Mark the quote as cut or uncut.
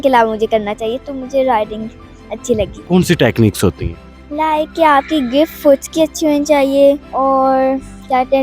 cut